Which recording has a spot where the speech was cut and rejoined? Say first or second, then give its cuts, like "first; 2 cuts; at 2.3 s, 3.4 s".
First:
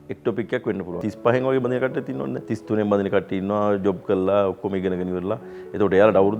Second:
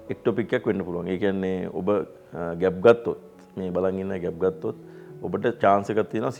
first; 2 cuts; at 1.0 s, 2.5 s